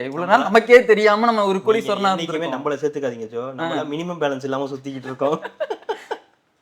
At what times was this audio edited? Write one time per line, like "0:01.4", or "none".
none